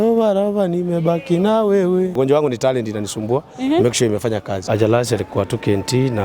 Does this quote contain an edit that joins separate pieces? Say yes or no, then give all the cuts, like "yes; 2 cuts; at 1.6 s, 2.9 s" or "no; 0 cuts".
yes; 2 cuts; at 2.2 s, 4.5 s